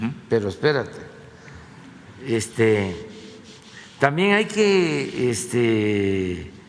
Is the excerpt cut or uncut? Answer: uncut